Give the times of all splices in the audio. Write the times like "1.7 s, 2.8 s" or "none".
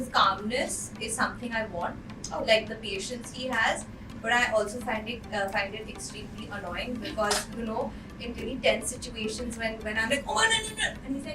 none